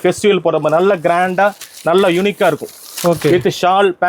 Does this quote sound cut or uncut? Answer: uncut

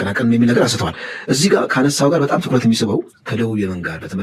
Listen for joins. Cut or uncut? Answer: uncut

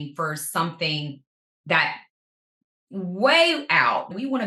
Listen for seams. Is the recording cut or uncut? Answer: uncut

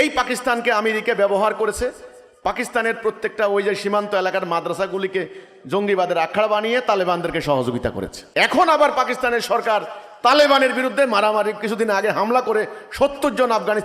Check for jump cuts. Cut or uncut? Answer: cut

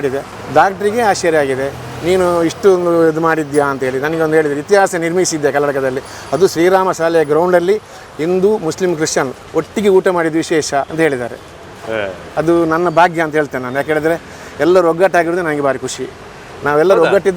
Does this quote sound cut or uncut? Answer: uncut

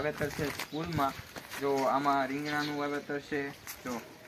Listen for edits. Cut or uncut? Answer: uncut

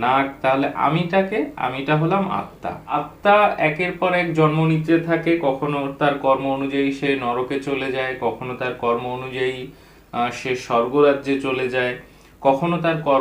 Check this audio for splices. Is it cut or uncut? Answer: cut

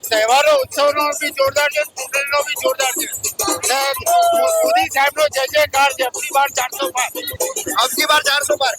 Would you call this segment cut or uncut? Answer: uncut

